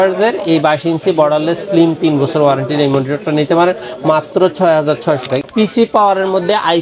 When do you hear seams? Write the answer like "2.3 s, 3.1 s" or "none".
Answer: 5.4 s